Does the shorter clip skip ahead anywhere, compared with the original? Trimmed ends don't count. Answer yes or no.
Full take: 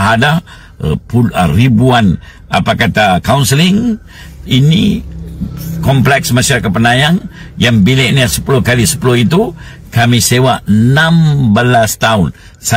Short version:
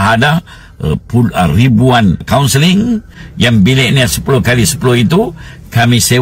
yes